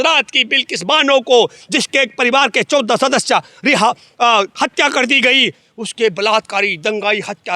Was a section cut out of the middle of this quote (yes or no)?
no